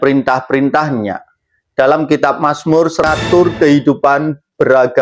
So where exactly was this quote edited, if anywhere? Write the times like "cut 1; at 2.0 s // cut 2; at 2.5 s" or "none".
cut 1; at 3.0 s